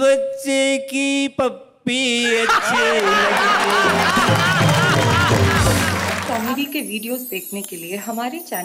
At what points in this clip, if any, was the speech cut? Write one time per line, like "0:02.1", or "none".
0:06.2